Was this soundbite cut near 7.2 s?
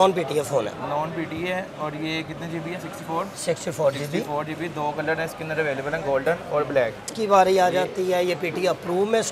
yes; 1 cut; at 7.2 s

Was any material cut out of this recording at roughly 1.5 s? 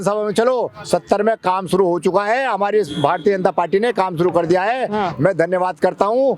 no; 0 cuts

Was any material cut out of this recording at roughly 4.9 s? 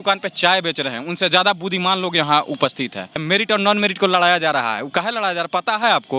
no; 1 cut; at 3.2 s

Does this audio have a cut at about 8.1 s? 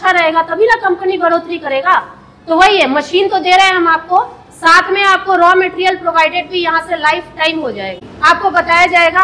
yes; 1 cut; at 8.1 s

